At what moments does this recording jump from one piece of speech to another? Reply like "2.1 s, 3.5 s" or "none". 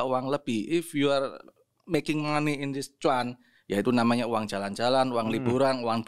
none

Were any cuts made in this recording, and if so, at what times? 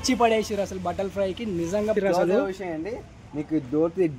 1.9 s

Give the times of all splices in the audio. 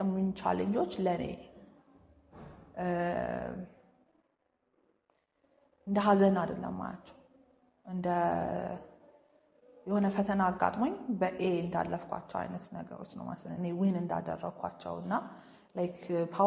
none

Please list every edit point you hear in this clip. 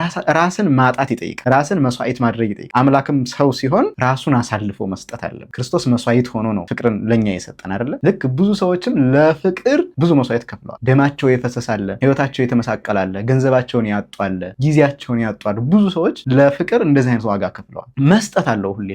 2.6 s, 6.7 s

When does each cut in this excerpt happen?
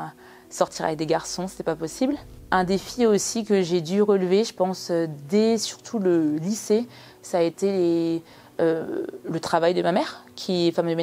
2.3 s

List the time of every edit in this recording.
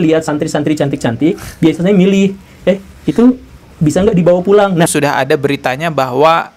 4.9 s

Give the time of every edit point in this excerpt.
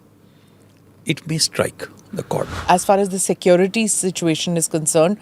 2.5 s

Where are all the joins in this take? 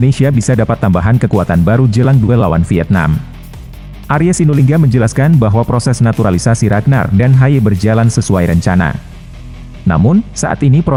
none

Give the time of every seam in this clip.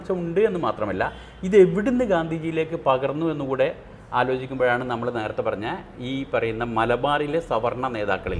none

